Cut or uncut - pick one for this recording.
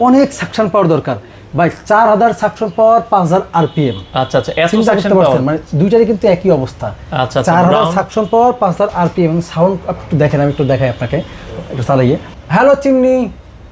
uncut